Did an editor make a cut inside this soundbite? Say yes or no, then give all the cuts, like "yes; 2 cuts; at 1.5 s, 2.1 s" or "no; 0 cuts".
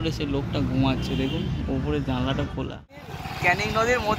yes; 1 cut; at 3.2 s